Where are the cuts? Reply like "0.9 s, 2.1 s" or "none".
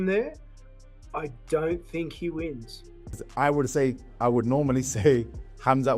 3.2 s